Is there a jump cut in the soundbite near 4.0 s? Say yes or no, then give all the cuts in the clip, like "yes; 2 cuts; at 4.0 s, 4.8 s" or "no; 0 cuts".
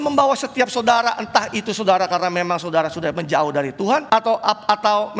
yes; 1 cut; at 4.0 s